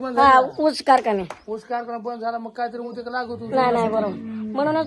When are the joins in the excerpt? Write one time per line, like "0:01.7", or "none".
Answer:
none